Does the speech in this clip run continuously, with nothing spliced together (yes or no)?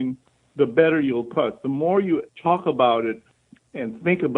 no